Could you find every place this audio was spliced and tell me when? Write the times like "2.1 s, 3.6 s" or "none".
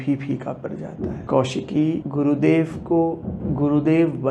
1.2 s, 2.1 s, 3.3 s